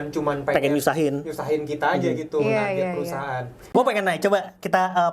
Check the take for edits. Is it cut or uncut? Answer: cut